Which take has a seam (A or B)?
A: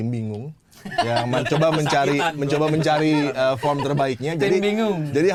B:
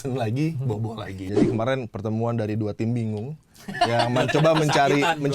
B